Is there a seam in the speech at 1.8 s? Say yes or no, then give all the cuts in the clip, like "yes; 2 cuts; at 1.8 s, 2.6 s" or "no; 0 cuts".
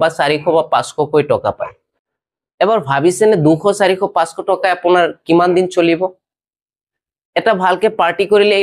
no; 0 cuts